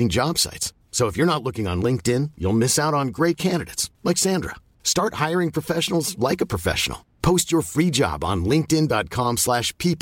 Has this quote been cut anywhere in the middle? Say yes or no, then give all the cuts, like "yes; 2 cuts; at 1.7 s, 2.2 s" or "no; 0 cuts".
no; 0 cuts